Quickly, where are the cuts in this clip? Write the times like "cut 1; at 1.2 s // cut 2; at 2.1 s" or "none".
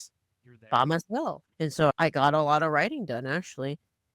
cut 1; at 1.4 s